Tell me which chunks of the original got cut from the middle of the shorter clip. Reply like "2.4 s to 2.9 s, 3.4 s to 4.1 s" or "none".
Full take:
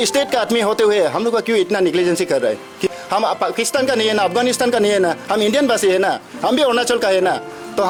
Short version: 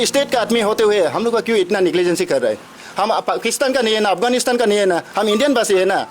2.8 s to 2.9 s